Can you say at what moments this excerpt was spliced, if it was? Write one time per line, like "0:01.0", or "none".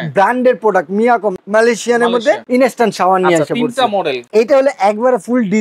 0:01.4
0:02.4
0:04.2